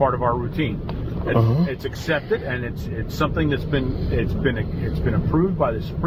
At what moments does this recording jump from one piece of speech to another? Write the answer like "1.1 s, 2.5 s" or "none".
none